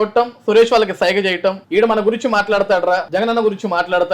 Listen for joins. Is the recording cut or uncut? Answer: cut